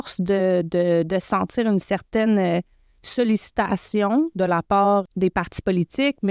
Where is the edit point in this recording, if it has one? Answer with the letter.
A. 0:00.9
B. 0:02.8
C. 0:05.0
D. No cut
C